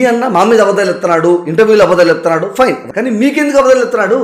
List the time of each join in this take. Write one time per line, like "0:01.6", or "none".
0:02.9

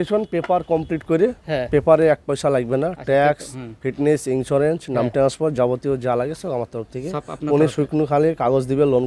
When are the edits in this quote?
none

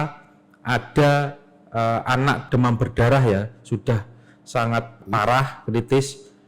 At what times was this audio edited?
0:02.4
0:05.0

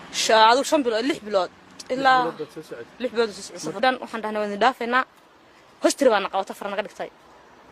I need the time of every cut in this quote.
none

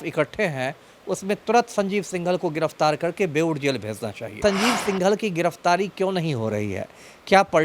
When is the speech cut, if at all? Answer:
0:04.4

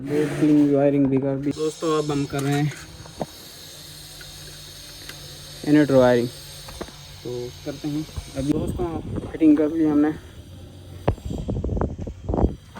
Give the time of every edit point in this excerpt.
0:01.5
0:08.5

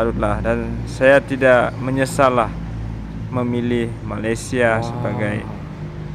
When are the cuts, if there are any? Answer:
none

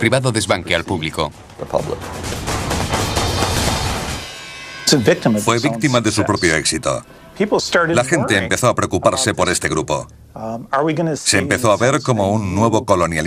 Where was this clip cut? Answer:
0:05.8

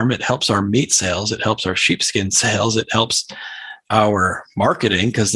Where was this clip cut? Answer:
none

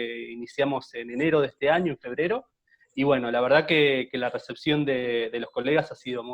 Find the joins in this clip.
none

